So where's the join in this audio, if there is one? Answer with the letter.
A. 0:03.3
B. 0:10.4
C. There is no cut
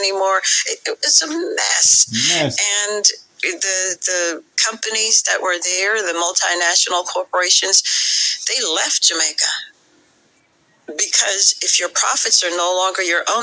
B